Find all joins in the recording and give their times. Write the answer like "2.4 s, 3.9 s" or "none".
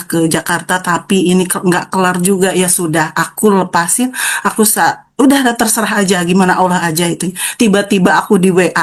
none